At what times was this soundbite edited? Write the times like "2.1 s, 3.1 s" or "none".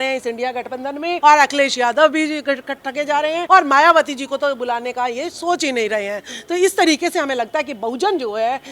1.2 s, 3.4 s